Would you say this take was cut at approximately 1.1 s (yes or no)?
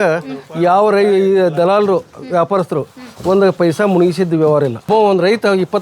no